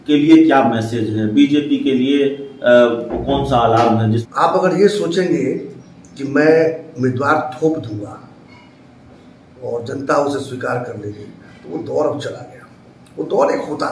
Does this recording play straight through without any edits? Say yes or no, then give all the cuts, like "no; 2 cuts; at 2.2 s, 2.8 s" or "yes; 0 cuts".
no; 1 cut; at 4.2 s